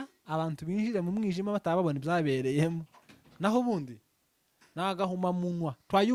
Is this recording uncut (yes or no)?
yes